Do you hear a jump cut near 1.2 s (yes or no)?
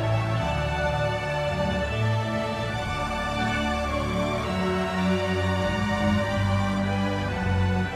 no